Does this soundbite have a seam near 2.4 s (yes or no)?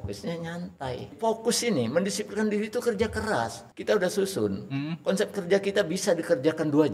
no